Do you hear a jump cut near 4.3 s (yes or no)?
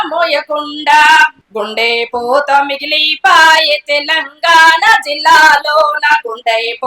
no